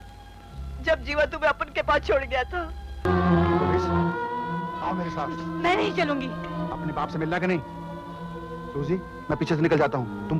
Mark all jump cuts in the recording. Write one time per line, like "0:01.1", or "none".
0:03.0

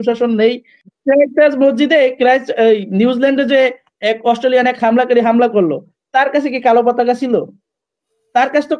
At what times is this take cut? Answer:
0:01.0

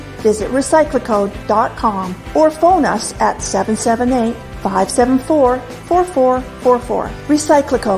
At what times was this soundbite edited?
none

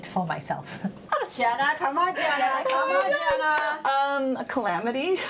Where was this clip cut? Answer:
0:01.0

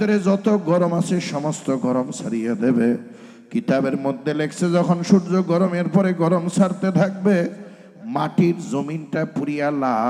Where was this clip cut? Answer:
none

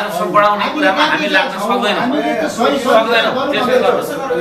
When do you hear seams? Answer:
none

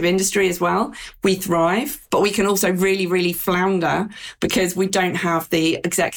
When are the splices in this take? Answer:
0:02.0

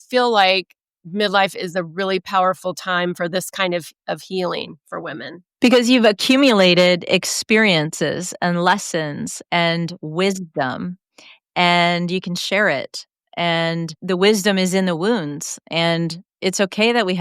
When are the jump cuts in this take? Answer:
0:14.0

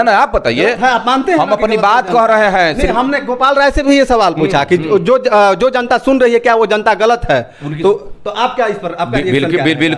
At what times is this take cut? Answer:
none

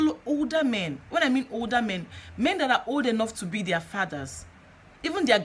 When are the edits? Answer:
none

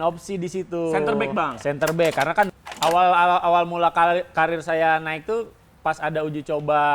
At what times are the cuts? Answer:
0:02.5

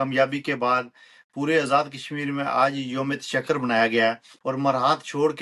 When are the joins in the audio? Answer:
0:04.3

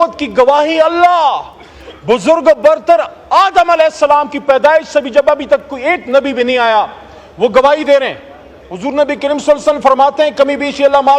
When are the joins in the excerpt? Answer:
0:08.6

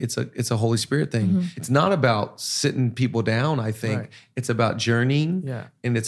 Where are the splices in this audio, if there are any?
0:01.6

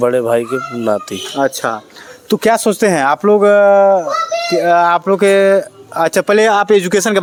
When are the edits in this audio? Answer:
none

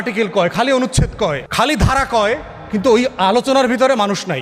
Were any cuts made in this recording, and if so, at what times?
0:01.4

